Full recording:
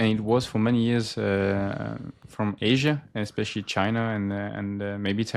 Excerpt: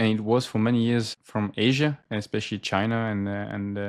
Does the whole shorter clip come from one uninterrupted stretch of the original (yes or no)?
no